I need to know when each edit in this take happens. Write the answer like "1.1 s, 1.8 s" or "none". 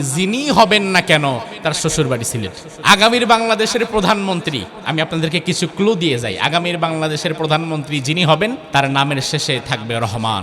2.6 s, 8.6 s